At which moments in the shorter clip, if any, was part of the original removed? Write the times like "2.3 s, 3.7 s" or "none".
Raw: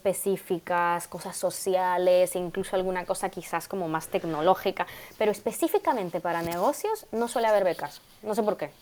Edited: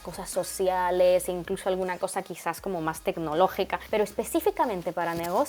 3.8 s